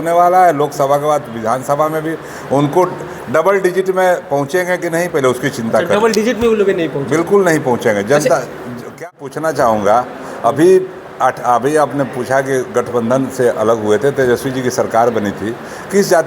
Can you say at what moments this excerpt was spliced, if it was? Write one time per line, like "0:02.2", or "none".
0:09.0